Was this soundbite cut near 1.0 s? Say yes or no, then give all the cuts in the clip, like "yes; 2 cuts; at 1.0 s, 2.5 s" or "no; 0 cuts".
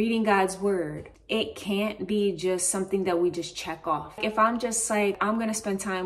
yes; 3 cuts; at 1.0 s, 4.2 s, 5.2 s